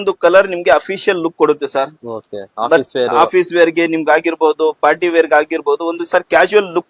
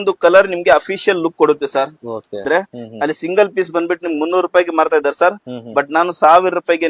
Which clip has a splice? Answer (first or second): second